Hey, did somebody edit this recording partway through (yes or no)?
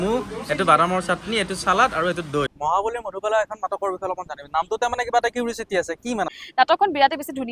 yes